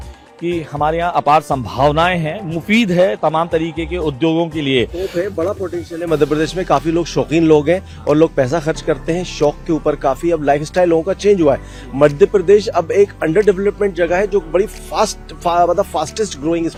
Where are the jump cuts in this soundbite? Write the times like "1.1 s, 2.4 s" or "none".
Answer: none